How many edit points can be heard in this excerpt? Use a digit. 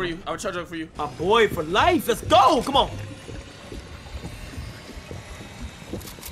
1